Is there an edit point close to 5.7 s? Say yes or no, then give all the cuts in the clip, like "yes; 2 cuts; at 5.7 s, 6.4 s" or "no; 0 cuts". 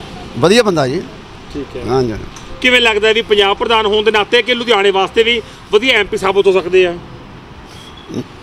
no; 0 cuts